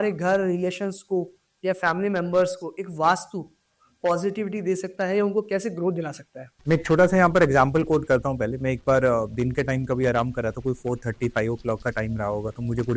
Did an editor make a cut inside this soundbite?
no; 0 cuts

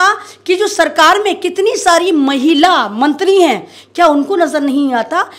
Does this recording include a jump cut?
no; 0 cuts

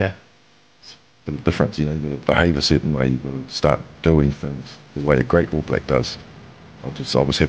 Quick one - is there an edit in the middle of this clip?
no; 0 cuts

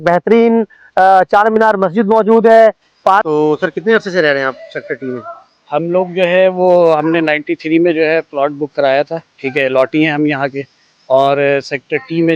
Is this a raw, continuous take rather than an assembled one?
no; 1 cut; at 3.3 s

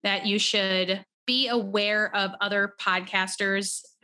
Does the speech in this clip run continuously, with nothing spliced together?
no; 1 cut; at 1.1 s

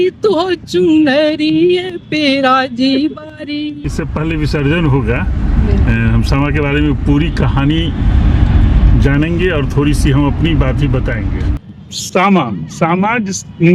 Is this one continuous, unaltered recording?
no; 2 cuts; at 3.8 s, 11.5 s

